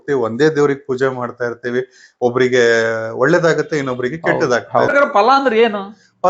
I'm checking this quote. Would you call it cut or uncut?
cut